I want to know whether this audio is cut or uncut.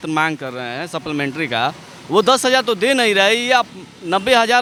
uncut